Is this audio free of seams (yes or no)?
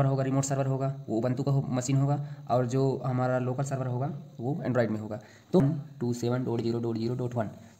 no